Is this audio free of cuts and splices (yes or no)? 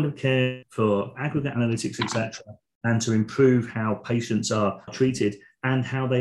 no